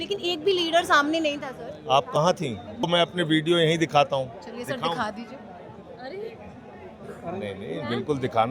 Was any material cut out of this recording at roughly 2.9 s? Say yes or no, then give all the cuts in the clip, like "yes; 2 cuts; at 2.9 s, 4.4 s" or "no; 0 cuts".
yes; 1 cut; at 2.9 s